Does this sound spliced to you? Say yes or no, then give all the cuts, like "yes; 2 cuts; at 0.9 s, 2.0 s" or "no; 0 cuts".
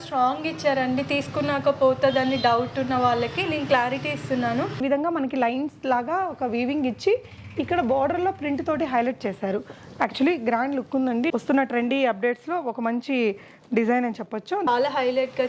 yes; 3 cuts; at 4.8 s, 11.3 s, 14.7 s